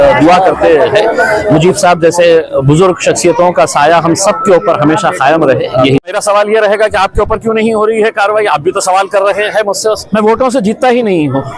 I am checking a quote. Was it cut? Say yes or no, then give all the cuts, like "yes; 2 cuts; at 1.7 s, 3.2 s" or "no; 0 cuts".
yes; 2 cuts; at 6.0 s, 10.0 s